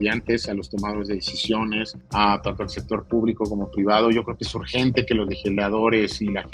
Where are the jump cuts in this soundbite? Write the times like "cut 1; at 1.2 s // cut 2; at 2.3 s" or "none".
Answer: cut 1; at 2.0 s